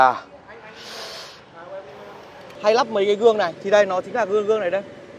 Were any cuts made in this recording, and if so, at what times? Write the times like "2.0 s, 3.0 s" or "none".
2.5 s